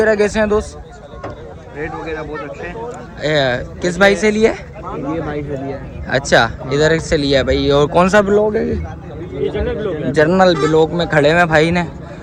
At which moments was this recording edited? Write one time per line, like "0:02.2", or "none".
none